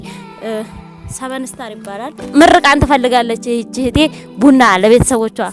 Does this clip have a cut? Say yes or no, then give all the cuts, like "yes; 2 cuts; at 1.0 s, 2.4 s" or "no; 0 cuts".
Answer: yes; 1 cut; at 2.3 s